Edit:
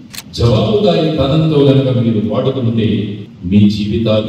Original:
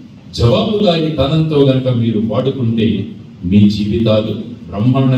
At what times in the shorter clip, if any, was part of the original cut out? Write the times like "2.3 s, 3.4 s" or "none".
none

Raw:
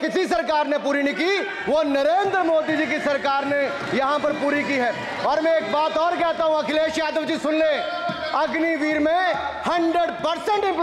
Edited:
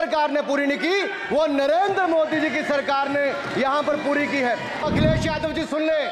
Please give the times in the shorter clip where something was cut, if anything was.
4.8 s

